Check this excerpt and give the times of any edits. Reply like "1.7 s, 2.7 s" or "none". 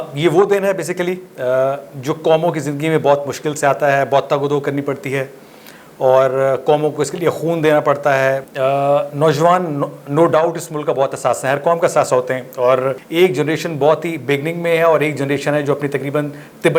8.4 s, 13.0 s